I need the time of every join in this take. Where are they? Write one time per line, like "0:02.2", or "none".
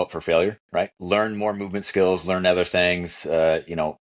0:01.0